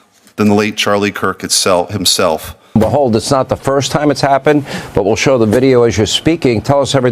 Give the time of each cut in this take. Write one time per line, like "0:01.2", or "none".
0:02.7